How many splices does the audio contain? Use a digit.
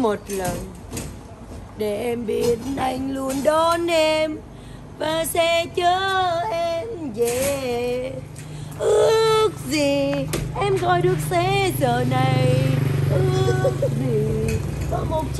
0